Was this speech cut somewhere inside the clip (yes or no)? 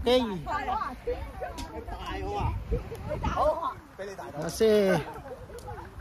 no